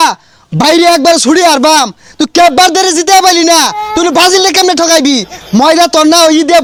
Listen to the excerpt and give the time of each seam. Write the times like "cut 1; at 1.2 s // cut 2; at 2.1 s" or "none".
none